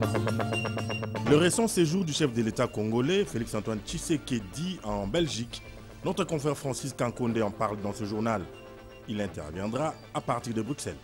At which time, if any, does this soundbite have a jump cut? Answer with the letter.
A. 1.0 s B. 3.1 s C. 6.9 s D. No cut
A